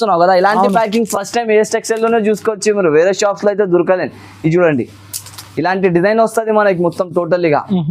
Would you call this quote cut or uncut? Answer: uncut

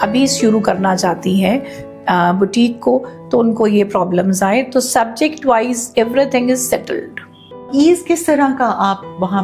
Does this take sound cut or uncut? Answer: cut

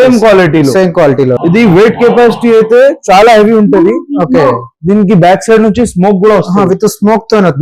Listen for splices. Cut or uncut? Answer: cut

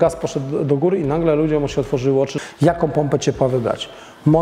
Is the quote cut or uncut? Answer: cut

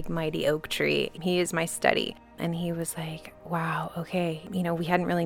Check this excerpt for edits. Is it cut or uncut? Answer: cut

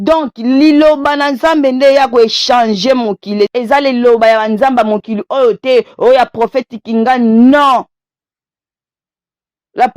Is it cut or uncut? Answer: cut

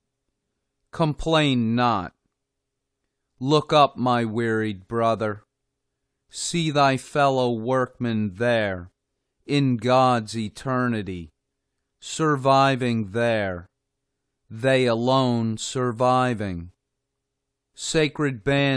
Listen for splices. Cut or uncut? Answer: uncut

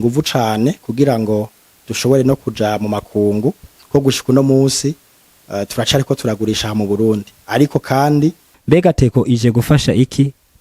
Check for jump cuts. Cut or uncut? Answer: cut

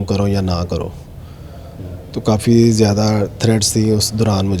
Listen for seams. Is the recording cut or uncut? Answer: uncut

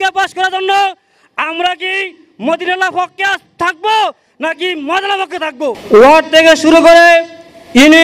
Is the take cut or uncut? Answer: cut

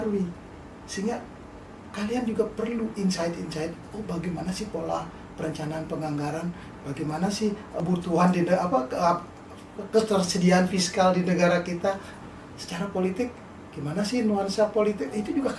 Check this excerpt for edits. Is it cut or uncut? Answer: cut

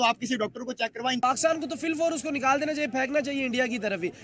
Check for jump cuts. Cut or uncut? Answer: cut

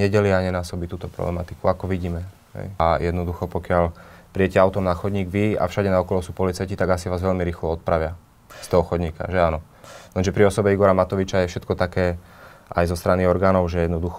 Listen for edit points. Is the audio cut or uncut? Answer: cut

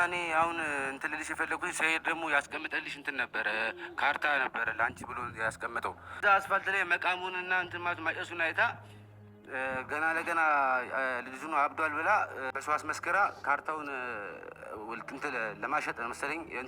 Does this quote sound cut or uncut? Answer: cut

